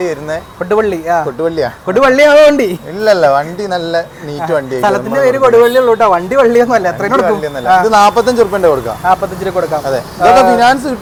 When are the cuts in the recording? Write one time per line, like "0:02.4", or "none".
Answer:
none